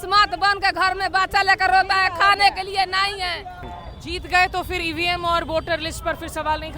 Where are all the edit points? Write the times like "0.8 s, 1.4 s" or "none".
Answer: 3.8 s